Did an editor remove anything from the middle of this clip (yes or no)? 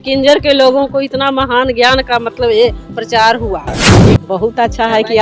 yes